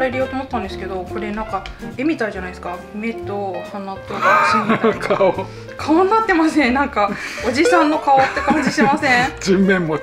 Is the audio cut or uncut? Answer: uncut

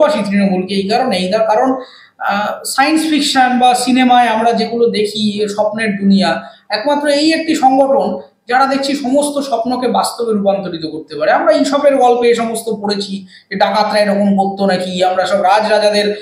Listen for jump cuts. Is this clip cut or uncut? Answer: uncut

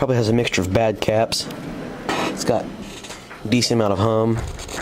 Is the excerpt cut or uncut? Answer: cut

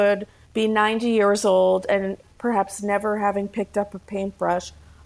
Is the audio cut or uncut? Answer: uncut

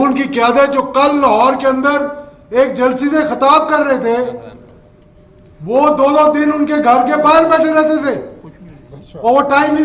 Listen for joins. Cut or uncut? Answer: uncut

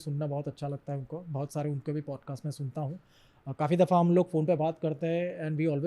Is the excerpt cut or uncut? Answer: uncut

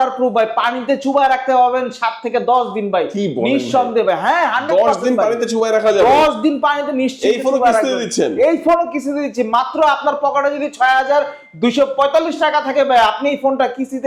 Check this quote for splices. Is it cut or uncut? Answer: uncut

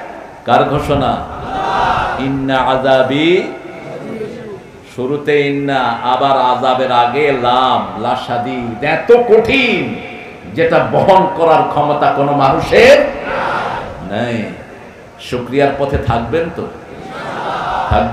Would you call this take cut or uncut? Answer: uncut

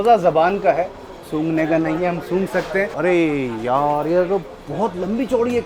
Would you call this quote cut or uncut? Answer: cut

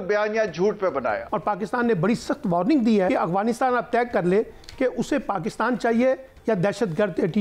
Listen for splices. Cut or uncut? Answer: cut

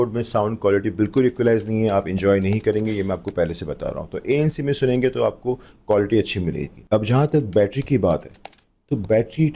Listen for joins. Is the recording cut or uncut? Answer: uncut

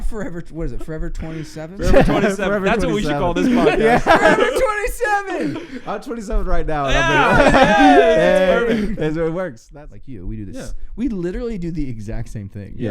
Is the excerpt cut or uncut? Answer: cut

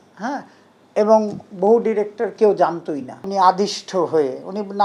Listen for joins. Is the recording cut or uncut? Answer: cut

